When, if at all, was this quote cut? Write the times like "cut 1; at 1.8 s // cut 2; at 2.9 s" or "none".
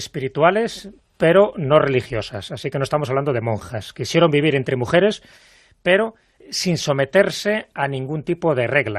cut 1; at 4.9 s